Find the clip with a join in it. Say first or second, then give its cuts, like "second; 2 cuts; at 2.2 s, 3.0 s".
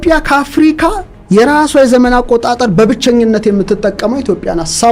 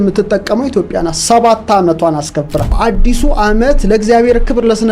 second; 1 cut; at 2.8 s